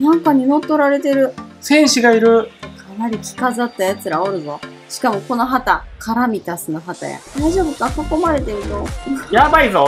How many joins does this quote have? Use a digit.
1